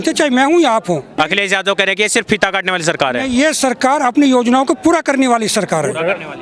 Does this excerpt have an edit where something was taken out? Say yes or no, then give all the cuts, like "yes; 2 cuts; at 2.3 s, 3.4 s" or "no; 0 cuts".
yes; 1 cut; at 1.2 s